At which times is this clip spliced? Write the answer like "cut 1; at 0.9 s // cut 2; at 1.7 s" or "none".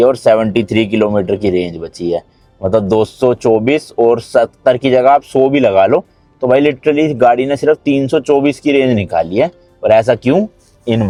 none